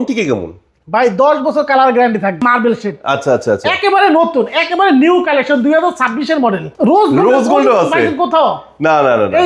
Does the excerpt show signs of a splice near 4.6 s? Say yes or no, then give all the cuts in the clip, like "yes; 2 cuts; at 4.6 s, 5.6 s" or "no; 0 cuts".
no; 2 cuts; at 2.4 s, 6.7 s